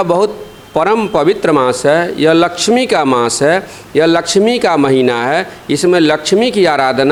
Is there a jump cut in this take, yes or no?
no